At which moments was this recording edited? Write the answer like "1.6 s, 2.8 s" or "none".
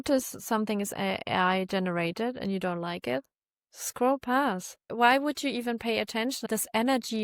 4.9 s, 6.5 s